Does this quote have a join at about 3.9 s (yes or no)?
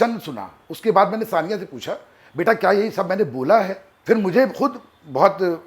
yes